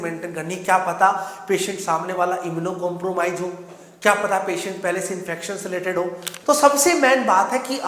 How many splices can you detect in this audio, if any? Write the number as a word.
one